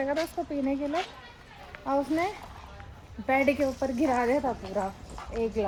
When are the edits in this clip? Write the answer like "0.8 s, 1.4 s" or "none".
none